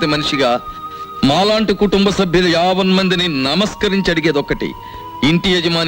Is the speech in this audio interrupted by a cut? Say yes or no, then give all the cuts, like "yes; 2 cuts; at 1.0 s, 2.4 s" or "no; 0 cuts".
no; 0 cuts